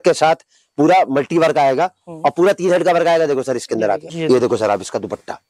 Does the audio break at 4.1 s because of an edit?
yes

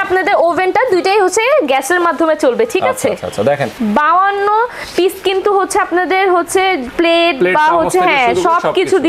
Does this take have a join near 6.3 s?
no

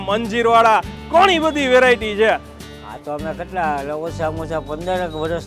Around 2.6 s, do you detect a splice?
yes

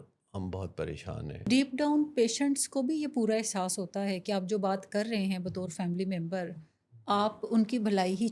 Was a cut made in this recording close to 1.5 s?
yes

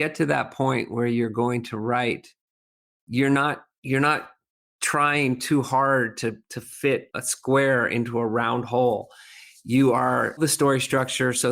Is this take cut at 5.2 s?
no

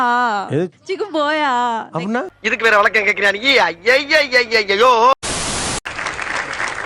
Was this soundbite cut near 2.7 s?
no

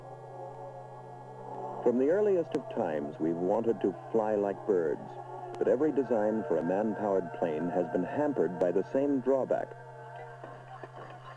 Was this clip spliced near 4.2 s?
no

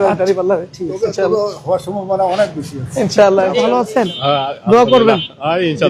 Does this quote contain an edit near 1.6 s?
no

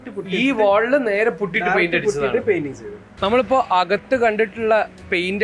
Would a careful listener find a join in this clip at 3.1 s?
yes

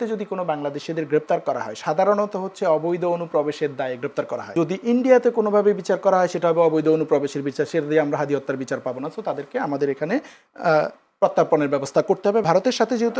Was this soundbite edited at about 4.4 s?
yes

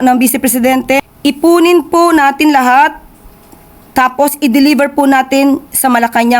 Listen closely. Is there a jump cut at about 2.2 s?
no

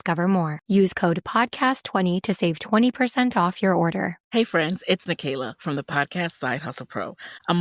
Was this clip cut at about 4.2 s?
yes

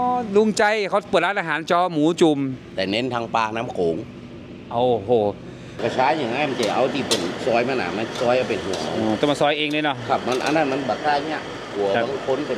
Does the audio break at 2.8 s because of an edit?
no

